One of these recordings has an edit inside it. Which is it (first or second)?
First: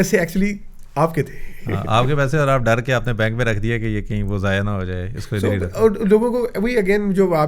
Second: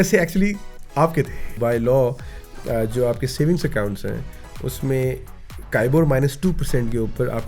second